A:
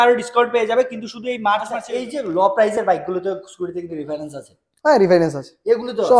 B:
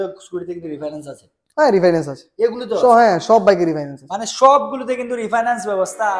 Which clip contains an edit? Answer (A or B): A